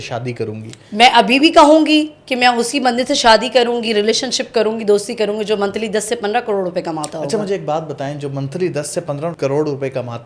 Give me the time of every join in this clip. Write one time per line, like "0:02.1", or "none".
none